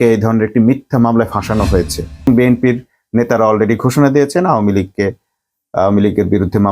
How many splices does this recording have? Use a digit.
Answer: 1